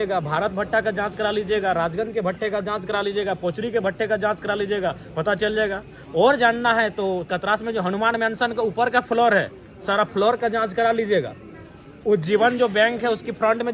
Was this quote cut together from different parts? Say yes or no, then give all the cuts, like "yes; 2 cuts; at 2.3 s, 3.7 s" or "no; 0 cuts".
no; 0 cuts